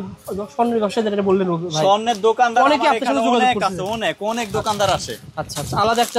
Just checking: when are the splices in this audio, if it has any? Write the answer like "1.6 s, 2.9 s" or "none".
none